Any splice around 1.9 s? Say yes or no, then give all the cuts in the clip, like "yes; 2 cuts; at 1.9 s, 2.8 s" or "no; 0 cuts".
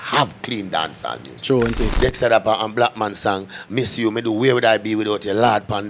yes; 1 cut; at 1.9 s